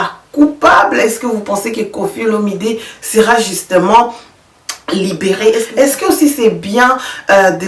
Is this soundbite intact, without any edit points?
no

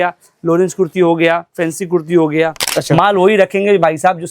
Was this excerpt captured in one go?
no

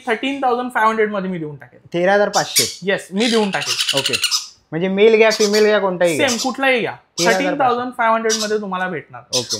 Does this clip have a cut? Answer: no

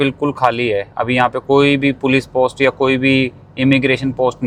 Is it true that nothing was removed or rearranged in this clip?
yes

